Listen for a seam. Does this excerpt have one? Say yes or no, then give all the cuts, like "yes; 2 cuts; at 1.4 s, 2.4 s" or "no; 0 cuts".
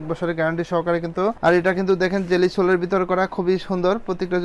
yes; 1 cut; at 1.4 s